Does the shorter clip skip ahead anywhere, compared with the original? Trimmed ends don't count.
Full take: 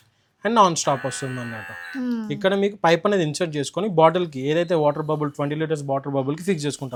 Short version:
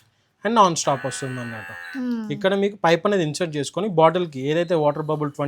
no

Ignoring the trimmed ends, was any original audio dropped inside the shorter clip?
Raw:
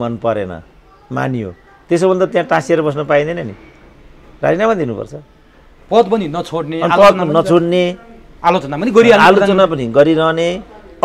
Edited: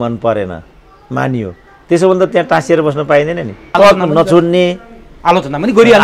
yes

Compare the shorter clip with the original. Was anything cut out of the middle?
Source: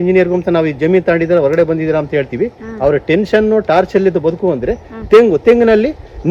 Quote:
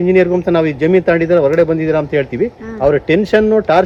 no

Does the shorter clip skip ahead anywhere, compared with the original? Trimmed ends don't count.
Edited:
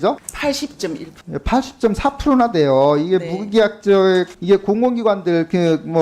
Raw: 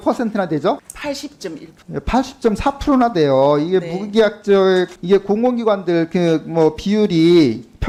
no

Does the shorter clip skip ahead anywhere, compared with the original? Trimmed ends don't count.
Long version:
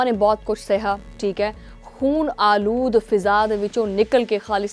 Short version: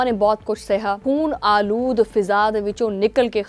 yes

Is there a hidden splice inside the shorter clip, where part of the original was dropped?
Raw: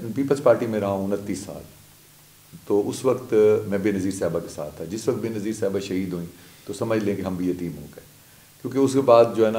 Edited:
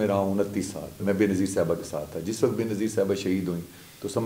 yes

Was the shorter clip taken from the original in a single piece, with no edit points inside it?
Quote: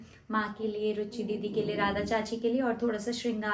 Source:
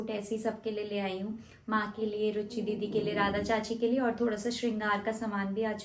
yes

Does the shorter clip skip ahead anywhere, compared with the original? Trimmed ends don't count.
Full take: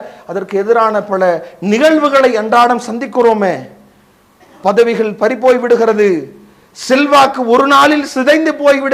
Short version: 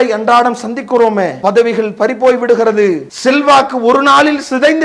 yes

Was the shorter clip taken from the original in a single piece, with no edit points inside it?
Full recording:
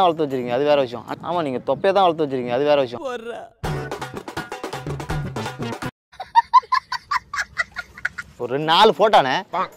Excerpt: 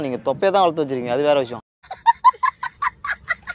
no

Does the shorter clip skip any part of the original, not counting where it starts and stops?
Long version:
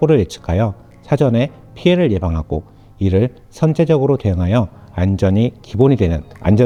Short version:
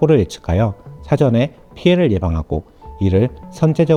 no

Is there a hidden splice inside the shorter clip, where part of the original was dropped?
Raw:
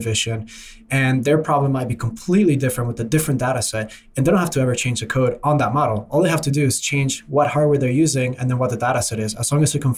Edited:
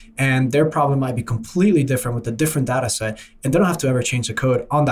no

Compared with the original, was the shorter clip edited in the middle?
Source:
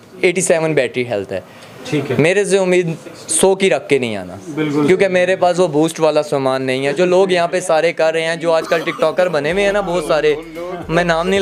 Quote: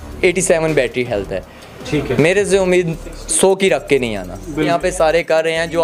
yes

